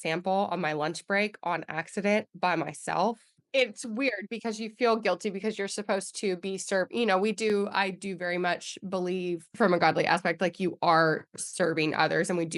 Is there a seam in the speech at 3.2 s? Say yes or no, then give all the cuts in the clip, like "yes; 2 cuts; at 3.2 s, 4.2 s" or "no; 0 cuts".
no; 0 cuts